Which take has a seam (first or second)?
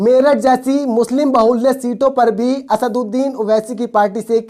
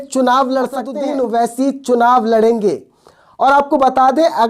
second